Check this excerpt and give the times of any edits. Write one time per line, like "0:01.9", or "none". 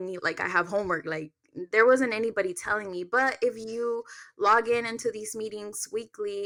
none